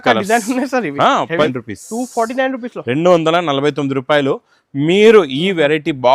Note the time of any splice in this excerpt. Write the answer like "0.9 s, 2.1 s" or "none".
1.5 s